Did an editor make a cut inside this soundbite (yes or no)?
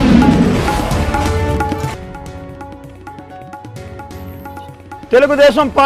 yes